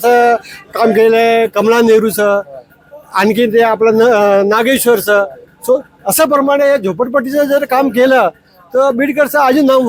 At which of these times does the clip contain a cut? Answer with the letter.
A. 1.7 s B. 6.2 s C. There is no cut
C